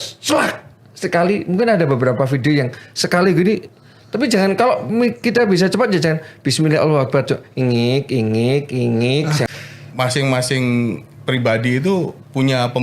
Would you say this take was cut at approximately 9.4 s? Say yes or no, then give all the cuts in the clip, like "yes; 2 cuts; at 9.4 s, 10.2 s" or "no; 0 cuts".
yes; 1 cut; at 9.4 s